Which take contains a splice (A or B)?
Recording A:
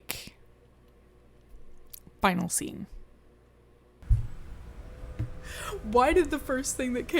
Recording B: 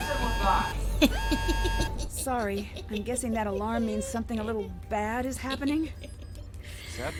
A